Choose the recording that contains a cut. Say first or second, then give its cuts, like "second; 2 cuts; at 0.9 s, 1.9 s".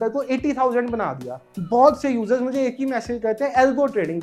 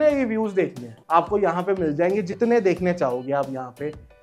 first; 1 cut; at 1.5 s